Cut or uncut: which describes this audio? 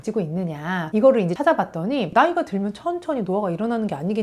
uncut